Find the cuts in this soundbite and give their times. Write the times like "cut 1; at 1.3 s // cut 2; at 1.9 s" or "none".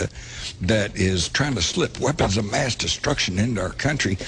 cut 1; at 3.0 s